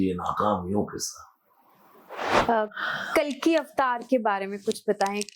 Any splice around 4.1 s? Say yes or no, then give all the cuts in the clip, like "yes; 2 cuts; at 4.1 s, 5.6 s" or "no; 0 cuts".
no; 1 cut; at 2.3 s